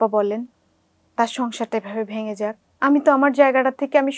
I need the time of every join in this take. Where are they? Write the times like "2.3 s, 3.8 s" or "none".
2.7 s